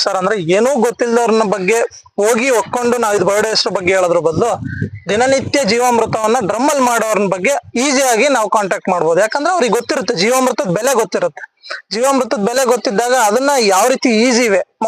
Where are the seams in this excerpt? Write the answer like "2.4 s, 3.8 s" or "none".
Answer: none